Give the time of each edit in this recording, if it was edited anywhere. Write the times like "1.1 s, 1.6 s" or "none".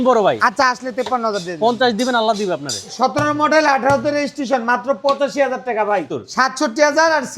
2.9 s, 6.2 s